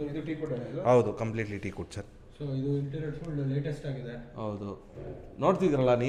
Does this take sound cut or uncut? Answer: uncut